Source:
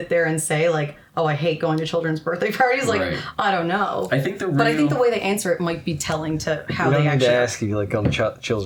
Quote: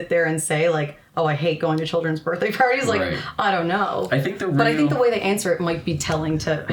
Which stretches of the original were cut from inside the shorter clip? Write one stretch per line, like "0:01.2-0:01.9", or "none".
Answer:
none